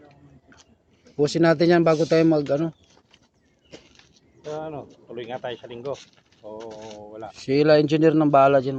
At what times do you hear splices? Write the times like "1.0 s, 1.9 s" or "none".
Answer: none